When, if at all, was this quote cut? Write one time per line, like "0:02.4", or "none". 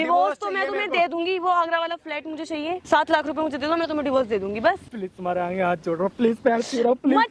0:02.8
0:04.9